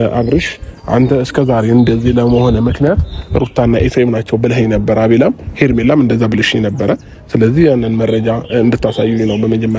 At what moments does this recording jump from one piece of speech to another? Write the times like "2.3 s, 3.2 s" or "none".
none